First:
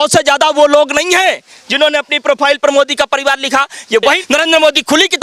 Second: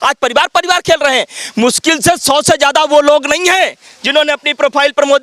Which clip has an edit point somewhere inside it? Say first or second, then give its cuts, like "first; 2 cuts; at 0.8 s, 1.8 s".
first; 1 cut; at 4.0 s